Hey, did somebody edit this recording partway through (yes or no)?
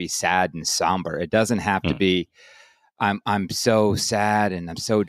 no